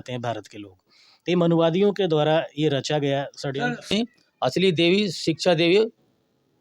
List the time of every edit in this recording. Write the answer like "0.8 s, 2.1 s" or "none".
3.9 s